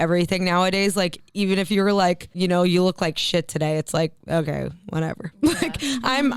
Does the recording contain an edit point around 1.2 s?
yes; 2 cuts; at 1.2 s, 2.3 s

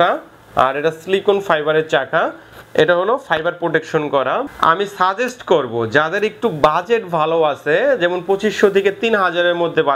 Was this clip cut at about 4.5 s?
yes; 1 cut; at 4.5 s

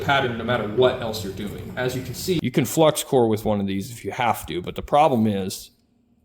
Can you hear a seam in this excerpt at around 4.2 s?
no; 1 cut; at 2.4 s

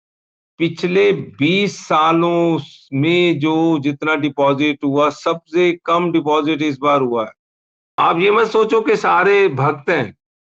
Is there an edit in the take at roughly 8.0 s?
yes; 1 cut; at 8.0 s

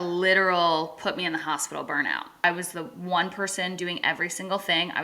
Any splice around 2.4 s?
yes; 1 cut; at 2.4 s

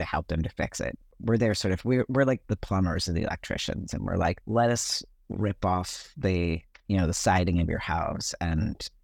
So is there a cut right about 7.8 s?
no; 3 cuts; at 1.1 s, 2.4 s, 4.4 s

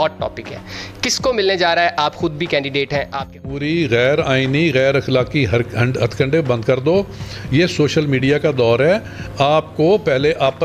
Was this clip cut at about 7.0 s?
no; 1 cut; at 3.6 s

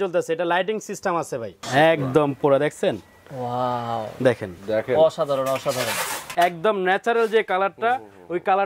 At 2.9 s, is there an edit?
no; 2 cuts; at 1.6 s, 6.2 s

